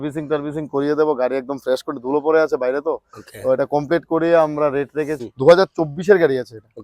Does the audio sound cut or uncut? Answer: cut